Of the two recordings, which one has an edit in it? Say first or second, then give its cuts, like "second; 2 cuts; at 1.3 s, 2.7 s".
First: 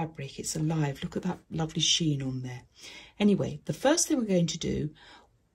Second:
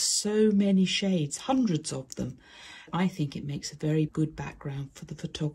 second; 2 cuts; at 2.9 s, 4.1 s